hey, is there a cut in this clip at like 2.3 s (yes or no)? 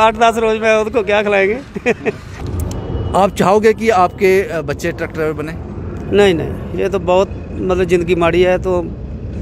yes